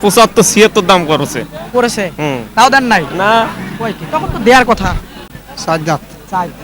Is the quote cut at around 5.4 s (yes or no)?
yes